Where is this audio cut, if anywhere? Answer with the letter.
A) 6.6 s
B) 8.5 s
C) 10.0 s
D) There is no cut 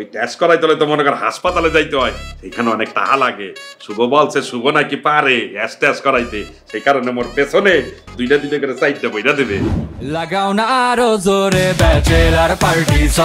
C